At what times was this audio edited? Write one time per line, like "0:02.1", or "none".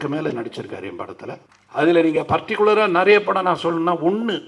0:01.5